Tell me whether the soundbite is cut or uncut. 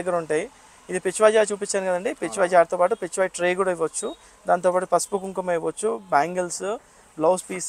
uncut